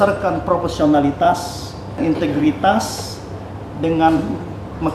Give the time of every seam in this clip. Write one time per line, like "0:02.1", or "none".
0:02.0